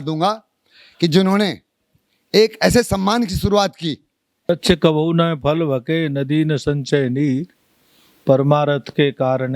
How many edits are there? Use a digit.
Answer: 1